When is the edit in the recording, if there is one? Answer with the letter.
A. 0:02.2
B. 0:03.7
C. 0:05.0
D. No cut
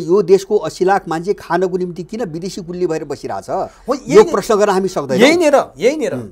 D